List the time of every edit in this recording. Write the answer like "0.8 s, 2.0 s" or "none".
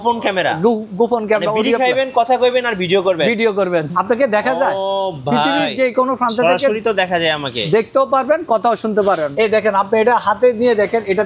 3.9 s, 9.3 s